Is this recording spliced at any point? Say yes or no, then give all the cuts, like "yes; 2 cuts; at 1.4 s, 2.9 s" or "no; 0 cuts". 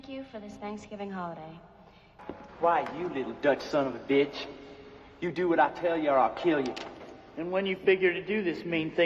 yes; 1 cut; at 1.7 s